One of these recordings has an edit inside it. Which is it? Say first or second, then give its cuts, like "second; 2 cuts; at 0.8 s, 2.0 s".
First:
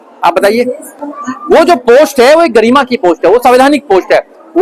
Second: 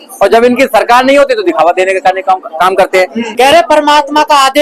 second; 1 cut; at 3.2 s